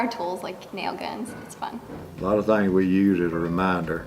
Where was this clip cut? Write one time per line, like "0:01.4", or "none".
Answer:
0:02.0